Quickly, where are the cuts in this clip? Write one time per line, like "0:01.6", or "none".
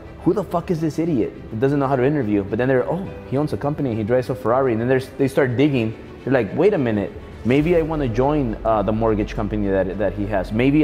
none

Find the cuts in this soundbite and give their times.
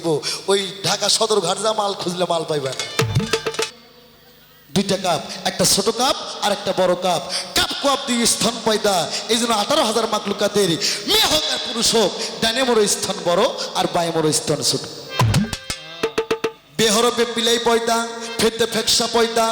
0:03.7

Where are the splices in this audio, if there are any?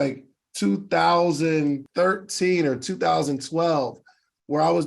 0:01.8

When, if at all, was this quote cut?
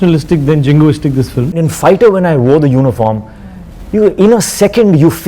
0:01.6

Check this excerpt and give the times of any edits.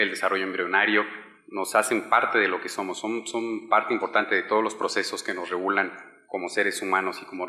0:04.4

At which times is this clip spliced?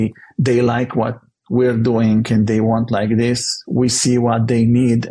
none

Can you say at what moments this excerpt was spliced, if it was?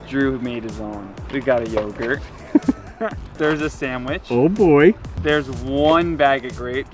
0:01.1
0:03.2
0:05.1

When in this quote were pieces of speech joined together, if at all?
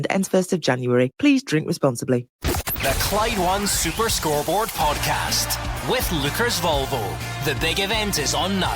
0:02.3

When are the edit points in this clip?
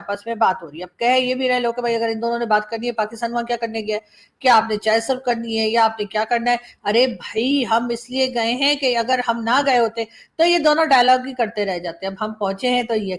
none

